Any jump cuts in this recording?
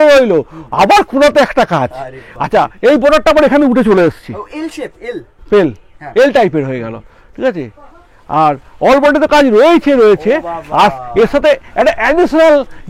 no; 0 cuts

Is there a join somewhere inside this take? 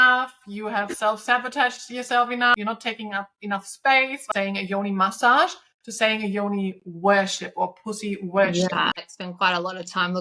yes; 3 cuts; at 2.5 s, 4.2 s, 9.1 s

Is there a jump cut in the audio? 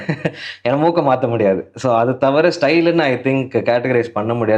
no; 0 cuts

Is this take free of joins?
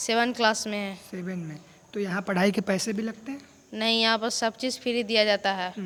yes; 0 cuts

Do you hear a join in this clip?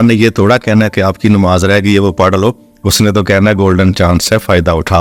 no; 0 cuts

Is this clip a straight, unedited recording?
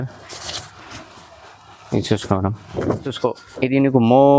no; 1 cut; at 3.2 s

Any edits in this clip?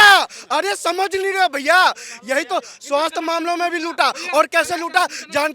no; 0 cuts

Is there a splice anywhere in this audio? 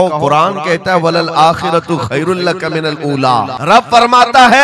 yes; 1 cut; at 3.6 s

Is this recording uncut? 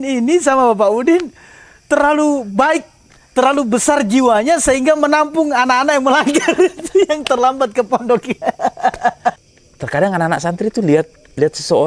no; 1 cut; at 9.5 s

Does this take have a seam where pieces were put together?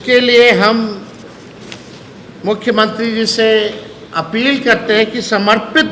no; 0 cuts

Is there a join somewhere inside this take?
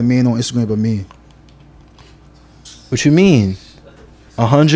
no; 0 cuts

